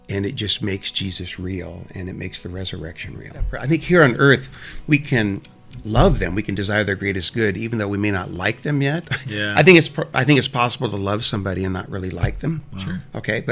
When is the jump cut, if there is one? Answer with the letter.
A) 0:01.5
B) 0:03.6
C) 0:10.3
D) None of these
B